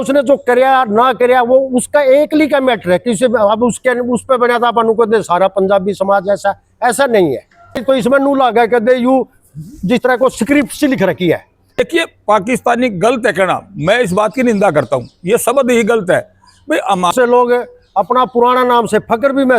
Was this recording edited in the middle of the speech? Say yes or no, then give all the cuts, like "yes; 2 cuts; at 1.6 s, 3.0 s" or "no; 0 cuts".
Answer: yes; 3 cuts; at 7.8 s, 11.8 s, 17.1 s